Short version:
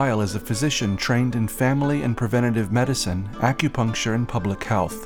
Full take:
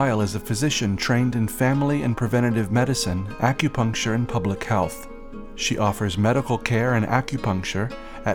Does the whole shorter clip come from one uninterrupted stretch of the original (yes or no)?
yes